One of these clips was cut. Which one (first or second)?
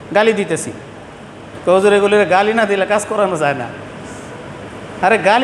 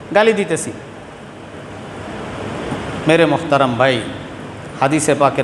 first